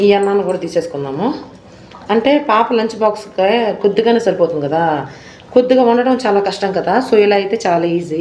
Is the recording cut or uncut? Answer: uncut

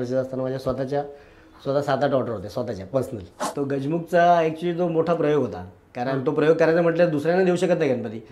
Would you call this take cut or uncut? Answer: cut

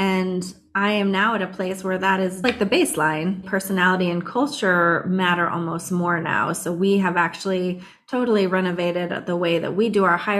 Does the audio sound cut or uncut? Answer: cut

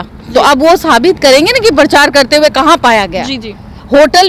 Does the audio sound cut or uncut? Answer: uncut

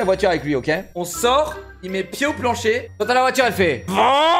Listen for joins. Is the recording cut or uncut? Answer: cut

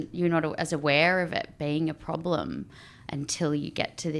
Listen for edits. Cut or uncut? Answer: uncut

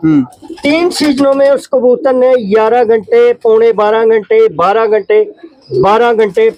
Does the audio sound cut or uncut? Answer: uncut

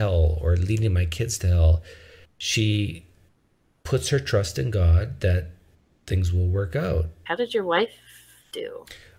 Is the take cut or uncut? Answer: cut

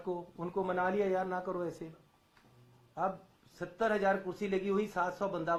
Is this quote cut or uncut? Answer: uncut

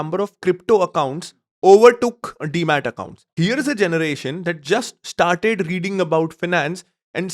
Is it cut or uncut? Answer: cut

